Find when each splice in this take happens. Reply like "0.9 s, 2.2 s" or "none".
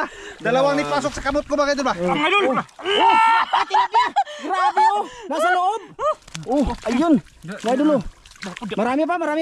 2.1 s